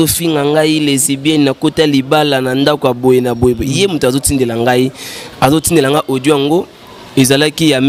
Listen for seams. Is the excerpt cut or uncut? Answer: uncut